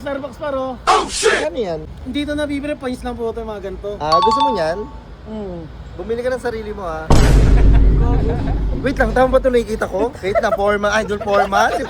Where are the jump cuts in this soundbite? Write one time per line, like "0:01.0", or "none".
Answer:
0:01.9
0:10.2